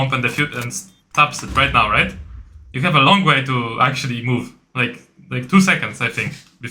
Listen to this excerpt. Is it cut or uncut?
uncut